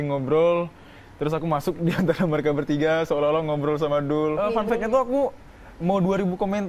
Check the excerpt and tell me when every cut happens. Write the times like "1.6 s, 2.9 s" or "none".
4.5 s

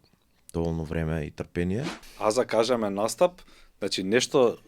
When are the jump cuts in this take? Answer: 2.0 s

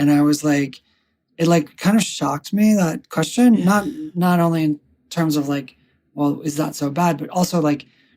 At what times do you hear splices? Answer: 4.0 s

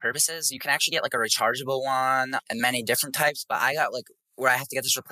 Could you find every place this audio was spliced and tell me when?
none

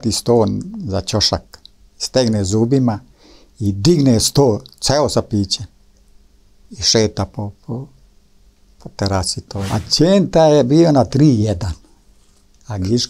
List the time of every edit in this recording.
9.7 s

